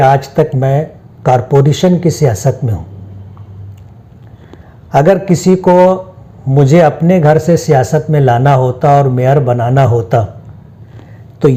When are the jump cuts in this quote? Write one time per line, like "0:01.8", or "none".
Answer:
none